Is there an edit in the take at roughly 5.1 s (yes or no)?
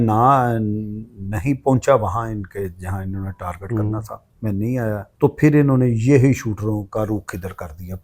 yes